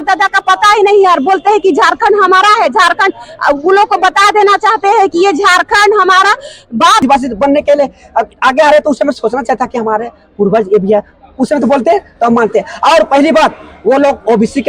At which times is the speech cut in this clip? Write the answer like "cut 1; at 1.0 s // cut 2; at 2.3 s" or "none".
cut 1; at 7.0 s

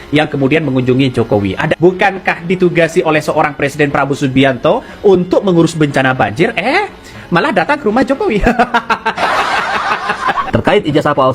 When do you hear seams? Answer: cut 1; at 1.7 s // cut 2; at 10.1 s

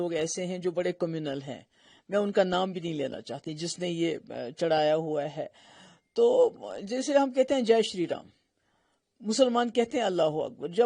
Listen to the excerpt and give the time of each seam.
none

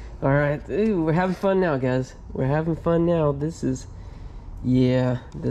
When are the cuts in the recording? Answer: none

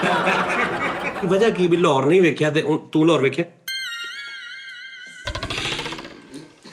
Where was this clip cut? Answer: cut 1; at 1.2 s

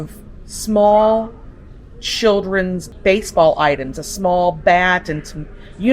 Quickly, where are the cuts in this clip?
cut 1; at 2.9 s

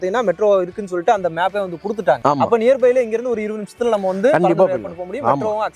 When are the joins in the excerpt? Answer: none

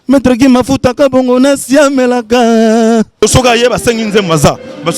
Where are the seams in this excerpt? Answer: cut 1; at 3.2 s

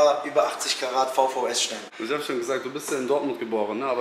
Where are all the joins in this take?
cut 1; at 1.8 s

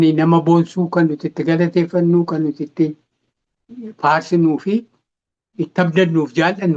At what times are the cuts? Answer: none

